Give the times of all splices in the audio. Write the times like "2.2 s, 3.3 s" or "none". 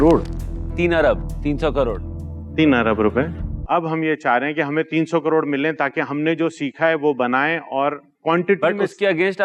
3.5 s